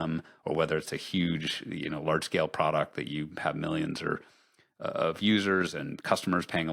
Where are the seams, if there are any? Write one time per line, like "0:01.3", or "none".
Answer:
none